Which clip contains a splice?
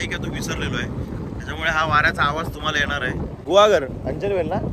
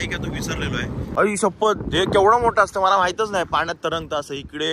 second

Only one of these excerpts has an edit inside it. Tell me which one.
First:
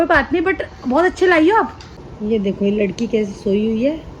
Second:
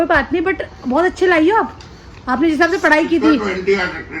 first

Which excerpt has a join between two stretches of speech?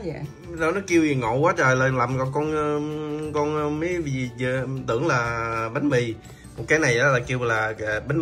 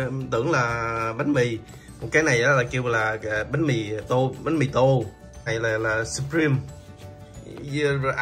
second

